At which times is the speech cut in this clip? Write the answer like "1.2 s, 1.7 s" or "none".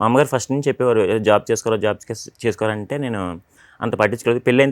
none